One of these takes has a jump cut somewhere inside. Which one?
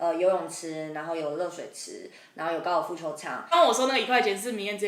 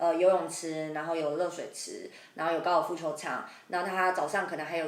first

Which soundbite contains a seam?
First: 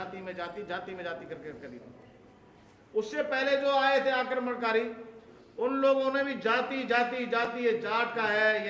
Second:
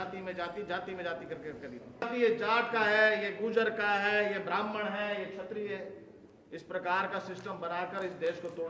second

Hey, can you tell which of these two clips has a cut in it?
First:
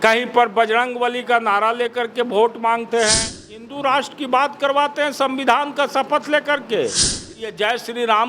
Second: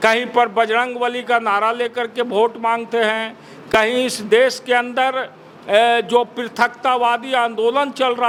first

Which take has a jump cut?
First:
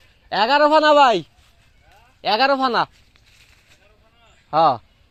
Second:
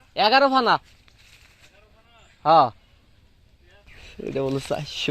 second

